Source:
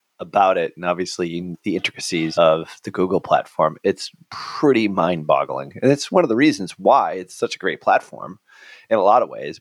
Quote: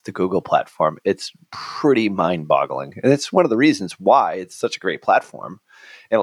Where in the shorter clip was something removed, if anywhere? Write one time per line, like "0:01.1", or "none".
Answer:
none